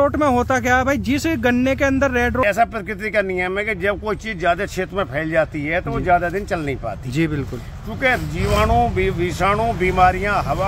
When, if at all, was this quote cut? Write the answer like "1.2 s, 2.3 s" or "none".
2.4 s

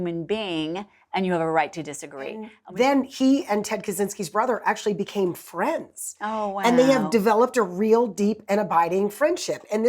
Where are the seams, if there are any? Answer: 2.6 s

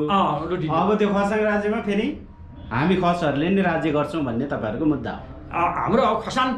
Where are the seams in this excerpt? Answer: none

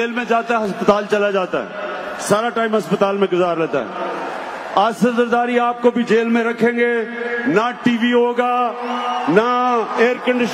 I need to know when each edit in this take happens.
none

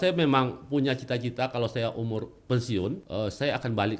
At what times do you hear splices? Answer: 3.0 s

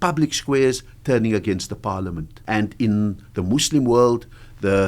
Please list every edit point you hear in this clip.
2.3 s

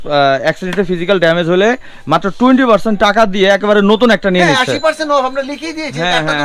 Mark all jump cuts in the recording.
none

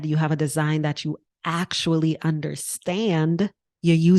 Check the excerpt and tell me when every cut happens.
none

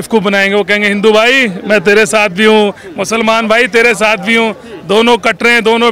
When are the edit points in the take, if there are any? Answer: none

